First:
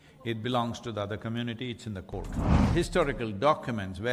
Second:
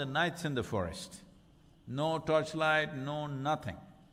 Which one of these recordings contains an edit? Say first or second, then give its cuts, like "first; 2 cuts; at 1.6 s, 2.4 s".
first; 1 cut; at 2.5 s